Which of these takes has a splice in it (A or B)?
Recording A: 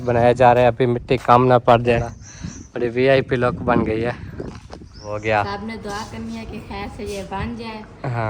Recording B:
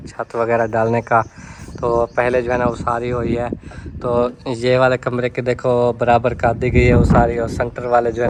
A